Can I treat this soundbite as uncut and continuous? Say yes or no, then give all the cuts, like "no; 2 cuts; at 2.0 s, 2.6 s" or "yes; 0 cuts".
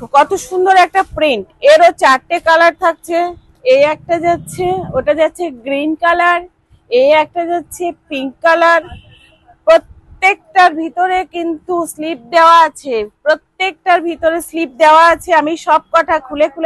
yes; 0 cuts